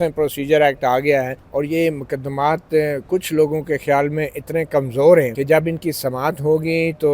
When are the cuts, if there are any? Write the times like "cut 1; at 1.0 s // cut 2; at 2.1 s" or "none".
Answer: cut 1; at 1.4 s // cut 2; at 5.4 s